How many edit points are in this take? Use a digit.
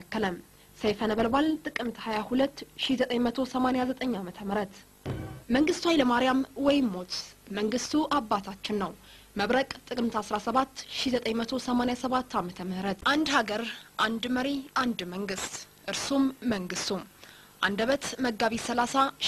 2